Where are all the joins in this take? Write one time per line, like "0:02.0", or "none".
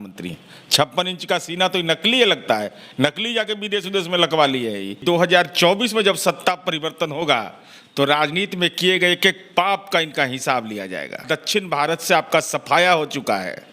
0:05.0
0:11.2